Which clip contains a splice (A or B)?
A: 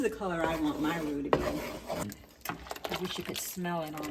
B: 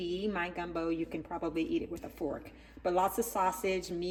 A